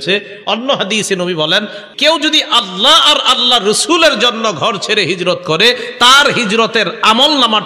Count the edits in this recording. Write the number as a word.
one